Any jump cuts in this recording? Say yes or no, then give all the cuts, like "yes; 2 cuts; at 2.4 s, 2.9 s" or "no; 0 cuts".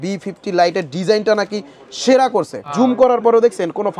yes; 1 cut; at 2.7 s